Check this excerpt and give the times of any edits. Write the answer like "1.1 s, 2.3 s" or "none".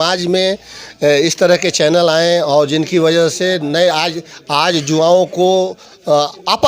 none